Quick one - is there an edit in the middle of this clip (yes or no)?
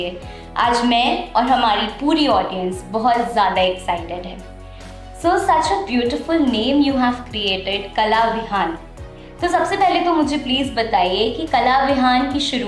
no